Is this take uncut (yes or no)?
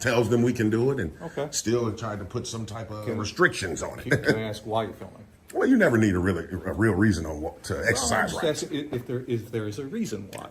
yes